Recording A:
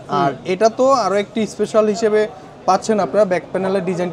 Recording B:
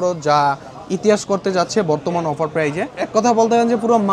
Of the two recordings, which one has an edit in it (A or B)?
B